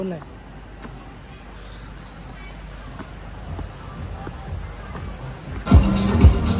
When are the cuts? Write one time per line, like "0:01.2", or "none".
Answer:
0:05.6